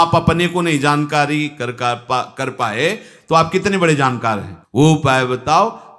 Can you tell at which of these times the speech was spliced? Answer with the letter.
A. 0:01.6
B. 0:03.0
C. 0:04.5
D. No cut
C